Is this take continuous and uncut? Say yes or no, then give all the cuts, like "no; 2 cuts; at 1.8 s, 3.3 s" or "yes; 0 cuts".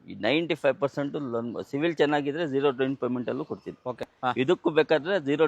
no; 1 cut; at 4.1 s